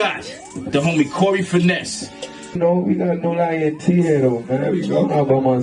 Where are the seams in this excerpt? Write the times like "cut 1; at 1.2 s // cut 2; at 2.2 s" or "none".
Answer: cut 1; at 2.6 s